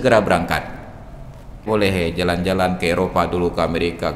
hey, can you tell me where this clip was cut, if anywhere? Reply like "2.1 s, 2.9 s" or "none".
1.7 s